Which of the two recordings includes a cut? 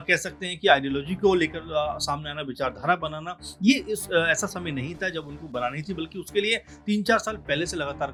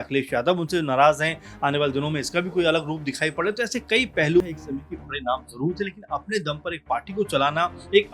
second; 1 cut; at 4.4 s

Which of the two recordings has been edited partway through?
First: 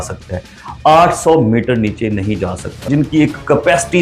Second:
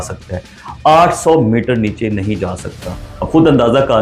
first; 1 cut; at 2.8 s

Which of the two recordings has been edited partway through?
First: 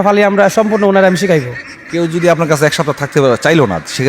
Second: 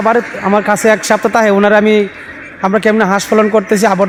first; 1 cut; at 1.8 s

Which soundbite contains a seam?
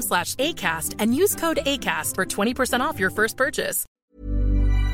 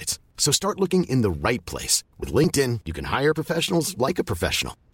first; 1 cut; at 3.8 s

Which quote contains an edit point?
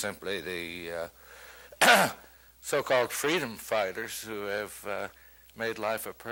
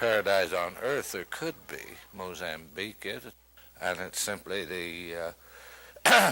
second; 1 cut; at 3.3 s

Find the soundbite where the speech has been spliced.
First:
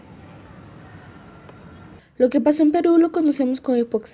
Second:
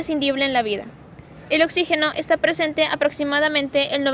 first; 1 cut; at 2.0 s

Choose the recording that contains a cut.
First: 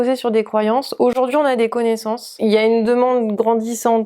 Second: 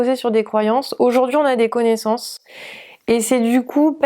first; 1 cut; at 2.3 s

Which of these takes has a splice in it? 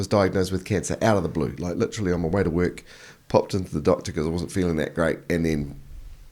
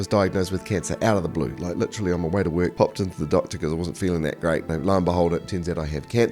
second; 2 cuts; at 2.7 s, 4.7 s

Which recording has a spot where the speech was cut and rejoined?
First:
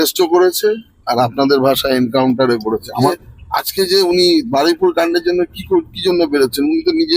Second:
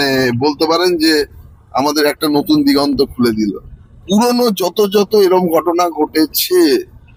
first; 1 cut; at 2.9 s

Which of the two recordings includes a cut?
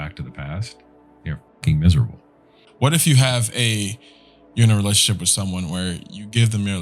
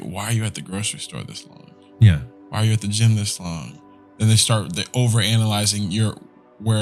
first; 1 cut; at 2.6 s

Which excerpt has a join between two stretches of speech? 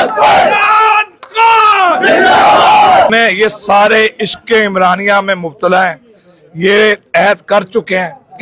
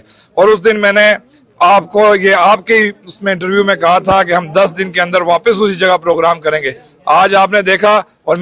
first; 1 cut; at 3.1 s

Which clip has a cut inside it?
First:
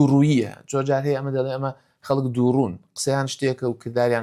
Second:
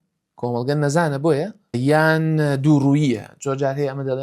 second; 1 cut; at 1.8 s

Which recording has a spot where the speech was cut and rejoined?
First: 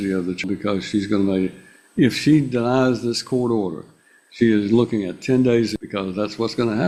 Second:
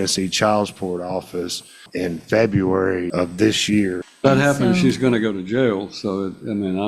second; 1 cut; at 4.0 s

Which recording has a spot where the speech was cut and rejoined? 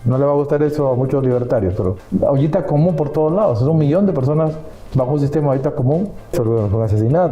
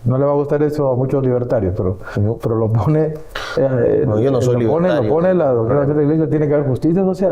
first; 2 cuts; at 2.0 s, 6.3 s

